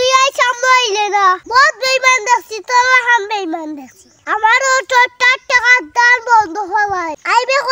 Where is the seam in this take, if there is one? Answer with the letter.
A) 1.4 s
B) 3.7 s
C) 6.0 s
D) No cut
A